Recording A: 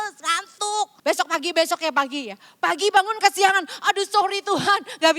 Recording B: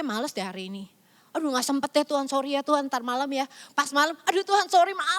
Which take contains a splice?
A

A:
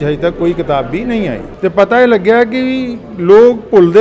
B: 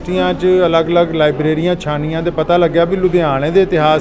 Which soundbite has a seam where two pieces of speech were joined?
A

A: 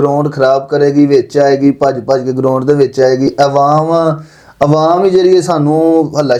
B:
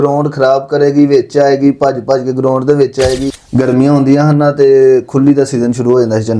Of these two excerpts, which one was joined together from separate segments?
B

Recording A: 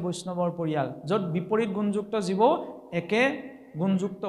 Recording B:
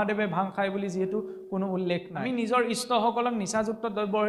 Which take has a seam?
B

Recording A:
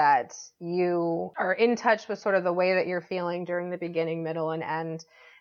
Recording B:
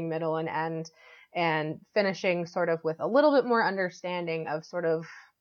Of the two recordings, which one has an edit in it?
A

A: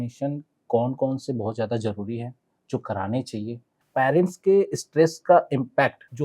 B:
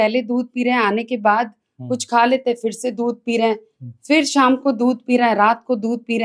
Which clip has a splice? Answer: A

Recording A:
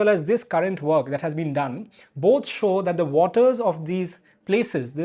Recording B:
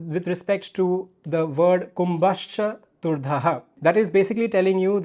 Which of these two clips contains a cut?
B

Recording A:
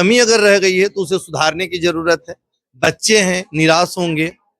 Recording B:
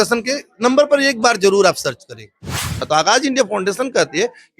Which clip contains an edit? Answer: B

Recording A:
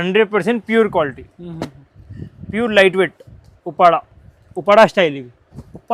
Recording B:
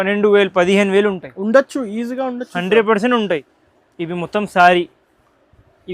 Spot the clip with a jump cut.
B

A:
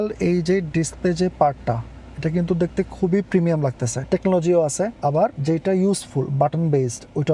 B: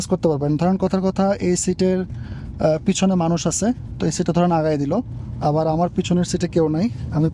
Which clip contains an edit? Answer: A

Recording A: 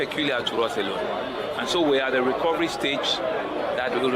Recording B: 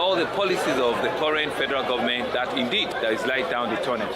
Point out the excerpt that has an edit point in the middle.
B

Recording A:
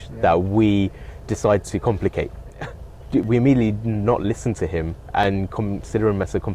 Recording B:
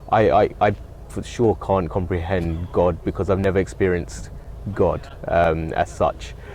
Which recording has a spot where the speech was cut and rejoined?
A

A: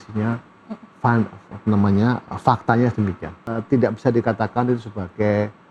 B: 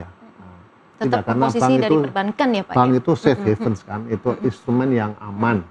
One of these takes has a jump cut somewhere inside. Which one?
A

